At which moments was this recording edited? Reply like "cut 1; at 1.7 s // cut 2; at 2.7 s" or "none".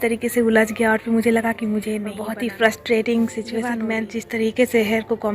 cut 1; at 2.1 s // cut 2; at 3.7 s